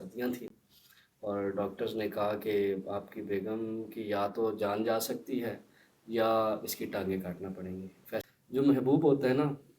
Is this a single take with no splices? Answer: no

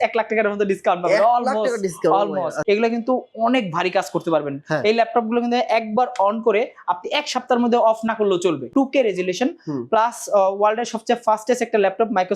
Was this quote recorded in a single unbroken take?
no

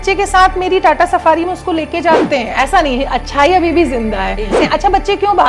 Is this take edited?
yes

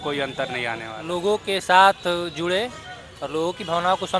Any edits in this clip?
yes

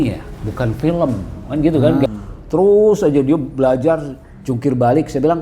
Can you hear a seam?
yes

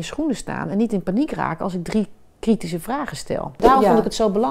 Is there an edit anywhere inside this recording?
yes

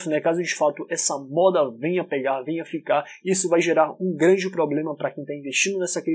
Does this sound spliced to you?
no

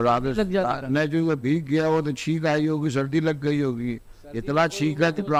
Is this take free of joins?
yes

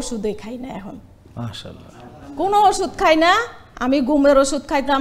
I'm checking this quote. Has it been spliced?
no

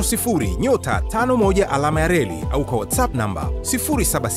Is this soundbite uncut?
yes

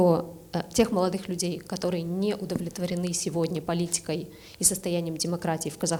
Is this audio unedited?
yes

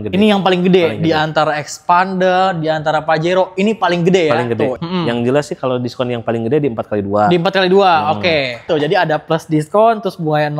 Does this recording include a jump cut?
yes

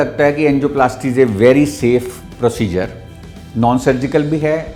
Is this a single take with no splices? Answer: yes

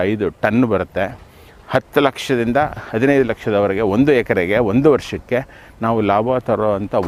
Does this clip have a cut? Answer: no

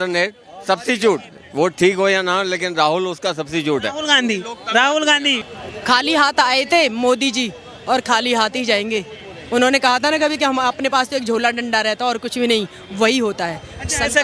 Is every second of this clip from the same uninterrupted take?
no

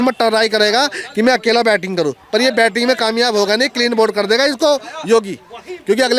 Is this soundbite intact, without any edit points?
yes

